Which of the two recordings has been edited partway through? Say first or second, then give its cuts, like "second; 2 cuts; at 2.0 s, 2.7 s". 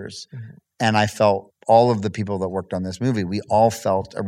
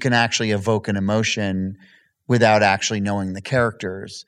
first; 1 cut; at 1.5 s